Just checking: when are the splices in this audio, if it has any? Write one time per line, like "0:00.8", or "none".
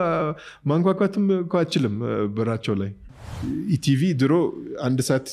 0:03.0